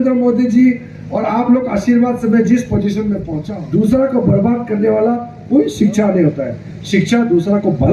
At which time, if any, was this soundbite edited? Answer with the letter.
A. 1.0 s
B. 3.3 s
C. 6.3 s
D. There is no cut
B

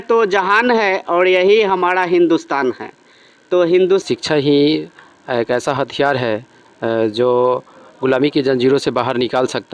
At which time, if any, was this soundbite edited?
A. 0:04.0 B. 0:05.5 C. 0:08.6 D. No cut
A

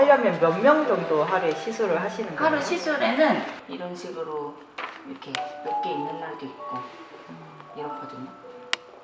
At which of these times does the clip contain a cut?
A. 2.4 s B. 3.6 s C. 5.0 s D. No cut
B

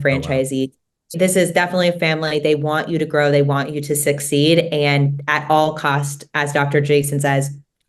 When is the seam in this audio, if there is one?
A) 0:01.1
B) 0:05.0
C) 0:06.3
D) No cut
A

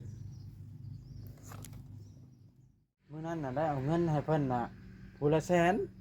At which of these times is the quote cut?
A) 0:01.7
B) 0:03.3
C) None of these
B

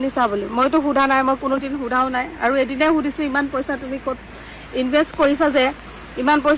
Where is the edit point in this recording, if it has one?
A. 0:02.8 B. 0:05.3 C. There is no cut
C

